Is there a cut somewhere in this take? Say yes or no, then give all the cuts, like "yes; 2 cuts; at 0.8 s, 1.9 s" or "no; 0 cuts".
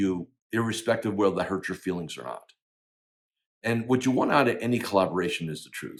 no; 0 cuts